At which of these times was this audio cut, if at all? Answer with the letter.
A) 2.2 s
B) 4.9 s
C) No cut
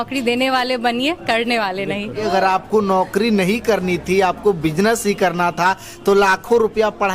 A